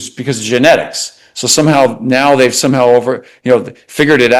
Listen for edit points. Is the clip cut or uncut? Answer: uncut